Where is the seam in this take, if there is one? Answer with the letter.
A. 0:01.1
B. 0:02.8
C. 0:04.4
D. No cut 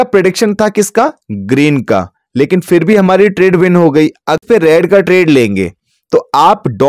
C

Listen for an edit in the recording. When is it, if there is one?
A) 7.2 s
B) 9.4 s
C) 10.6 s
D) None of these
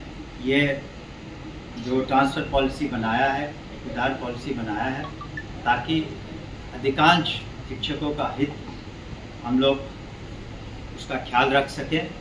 D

